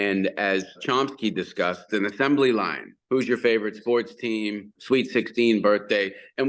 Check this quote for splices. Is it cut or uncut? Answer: cut